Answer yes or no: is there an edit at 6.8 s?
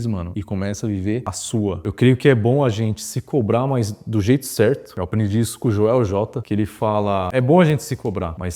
no